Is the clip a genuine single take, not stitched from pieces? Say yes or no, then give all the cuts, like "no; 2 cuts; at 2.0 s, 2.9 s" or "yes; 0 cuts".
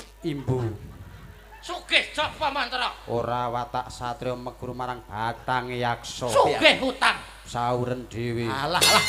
yes; 0 cuts